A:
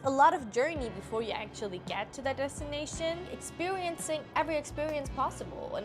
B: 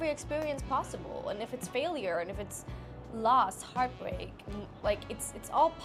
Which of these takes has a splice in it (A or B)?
A